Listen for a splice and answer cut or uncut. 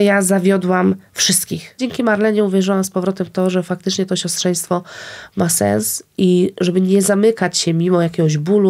cut